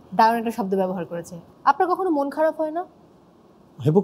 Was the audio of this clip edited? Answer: yes; 1 cut; at 1.4 s

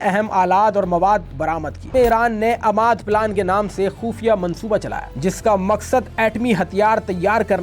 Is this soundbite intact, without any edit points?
no; 2 cuts; at 1.9 s, 5.0 s

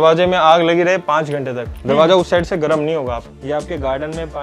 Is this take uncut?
no; 1 cut; at 3.3 s

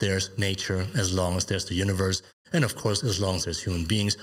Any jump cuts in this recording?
no; 0 cuts

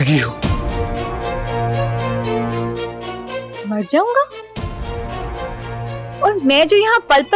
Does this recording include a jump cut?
no; 0 cuts

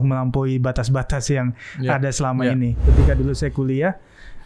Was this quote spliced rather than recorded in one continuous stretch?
yes; 1 cut; at 2.9 s

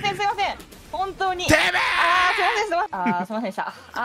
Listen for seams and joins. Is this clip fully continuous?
no; 1 cut; at 2.9 s

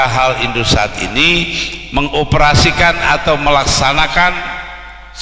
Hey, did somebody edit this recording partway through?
no; 0 cuts

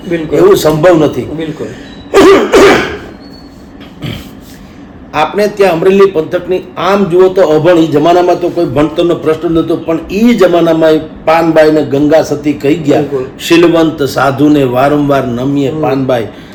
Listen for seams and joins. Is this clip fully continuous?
yes; 0 cuts

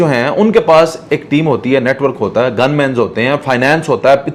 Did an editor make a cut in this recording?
no; 0 cuts

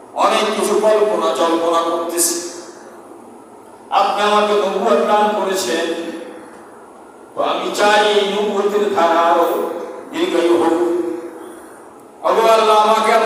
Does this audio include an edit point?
no; 0 cuts

